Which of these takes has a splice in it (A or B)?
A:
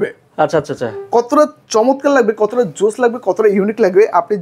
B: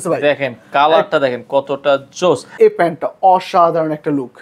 B